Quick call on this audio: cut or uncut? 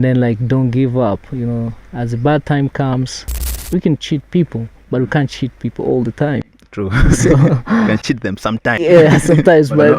cut